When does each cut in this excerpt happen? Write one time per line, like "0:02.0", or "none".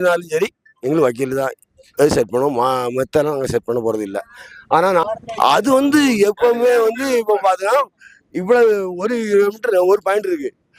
none